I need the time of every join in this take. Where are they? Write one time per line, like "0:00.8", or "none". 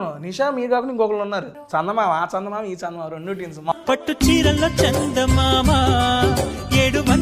0:01.6
0:03.7